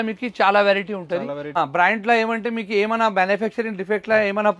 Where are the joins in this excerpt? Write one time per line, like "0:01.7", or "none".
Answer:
0:01.6